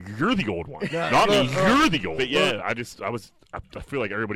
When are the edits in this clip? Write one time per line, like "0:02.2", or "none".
0:02.2